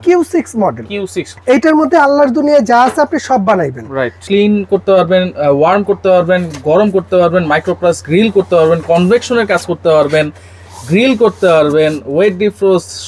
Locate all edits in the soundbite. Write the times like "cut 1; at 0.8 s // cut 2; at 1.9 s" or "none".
cut 1; at 1.2 s // cut 2; at 4.2 s